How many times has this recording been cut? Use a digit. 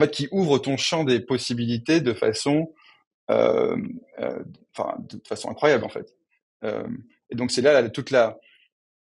0